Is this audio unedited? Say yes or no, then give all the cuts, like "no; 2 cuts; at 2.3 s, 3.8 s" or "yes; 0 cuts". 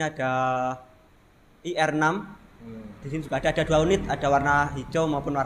yes; 0 cuts